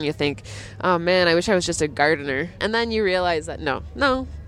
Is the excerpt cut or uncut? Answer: cut